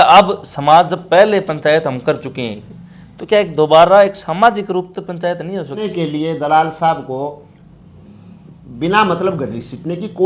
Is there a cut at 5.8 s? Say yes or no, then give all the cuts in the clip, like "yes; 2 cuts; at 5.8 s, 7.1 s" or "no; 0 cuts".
yes; 1 cut; at 5.8 s